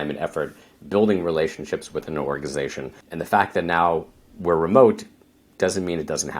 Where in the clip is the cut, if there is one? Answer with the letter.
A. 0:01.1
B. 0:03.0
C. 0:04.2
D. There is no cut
B